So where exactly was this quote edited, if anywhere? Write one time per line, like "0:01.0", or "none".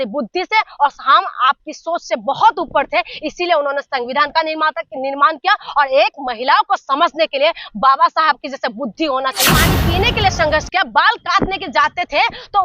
0:09.5